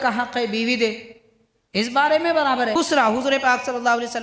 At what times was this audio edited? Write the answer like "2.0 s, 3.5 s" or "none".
2.8 s